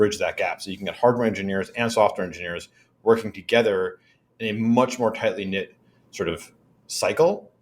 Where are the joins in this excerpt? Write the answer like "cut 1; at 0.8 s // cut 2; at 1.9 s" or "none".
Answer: none